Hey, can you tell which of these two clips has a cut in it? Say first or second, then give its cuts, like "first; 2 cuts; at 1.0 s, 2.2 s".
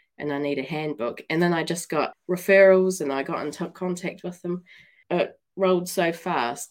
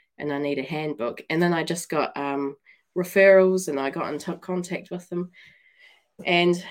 first; 2 cuts; at 2.1 s, 5.0 s